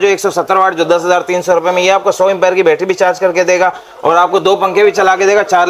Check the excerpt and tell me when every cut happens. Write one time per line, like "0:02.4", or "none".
none